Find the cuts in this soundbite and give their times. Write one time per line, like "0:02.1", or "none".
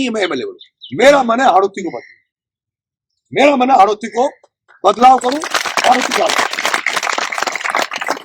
none